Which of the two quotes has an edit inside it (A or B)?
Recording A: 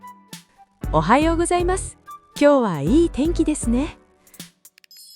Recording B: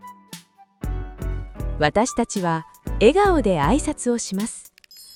A